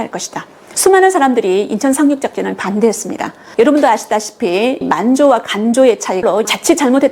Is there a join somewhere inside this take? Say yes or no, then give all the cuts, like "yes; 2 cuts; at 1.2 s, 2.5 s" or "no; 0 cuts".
no; 0 cuts